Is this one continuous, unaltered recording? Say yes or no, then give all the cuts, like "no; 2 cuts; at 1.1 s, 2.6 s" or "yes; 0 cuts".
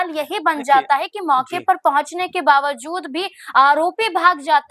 yes; 0 cuts